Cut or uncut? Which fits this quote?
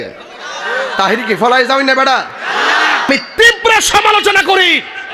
cut